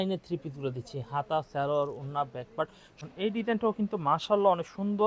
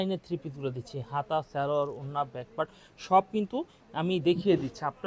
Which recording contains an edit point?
first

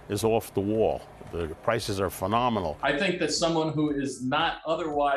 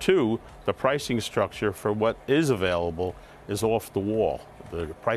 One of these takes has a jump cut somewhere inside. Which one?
first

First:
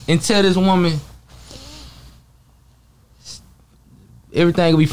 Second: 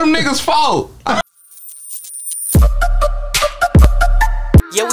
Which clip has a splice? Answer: second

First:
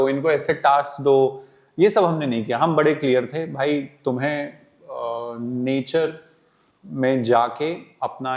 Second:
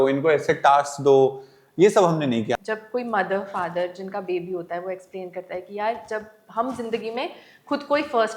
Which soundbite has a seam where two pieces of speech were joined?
second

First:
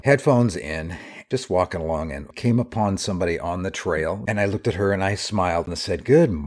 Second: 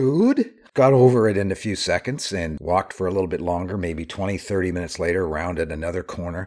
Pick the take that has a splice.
first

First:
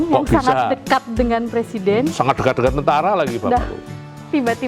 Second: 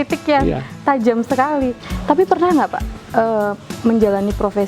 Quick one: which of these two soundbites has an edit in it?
second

